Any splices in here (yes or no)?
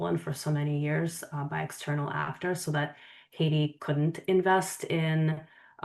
no